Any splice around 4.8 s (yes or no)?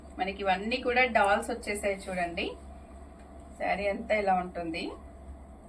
no